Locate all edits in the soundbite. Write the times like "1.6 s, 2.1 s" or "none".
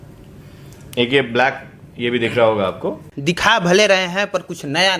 3.0 s